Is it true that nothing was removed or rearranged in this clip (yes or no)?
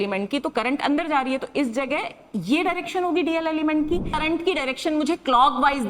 no